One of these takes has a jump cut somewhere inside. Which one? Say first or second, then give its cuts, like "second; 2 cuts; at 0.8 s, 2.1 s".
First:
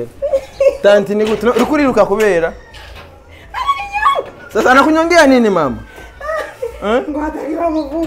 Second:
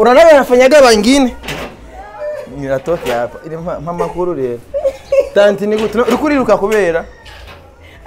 second; 1 cut; at 1.4 s